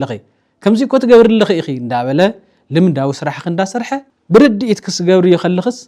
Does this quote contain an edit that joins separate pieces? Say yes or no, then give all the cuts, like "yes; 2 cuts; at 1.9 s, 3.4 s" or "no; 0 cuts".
no; 0 cuts